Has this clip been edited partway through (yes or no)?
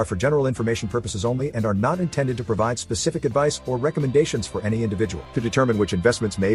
no